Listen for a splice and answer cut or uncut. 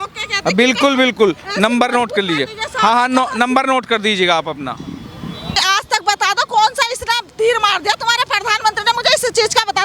cut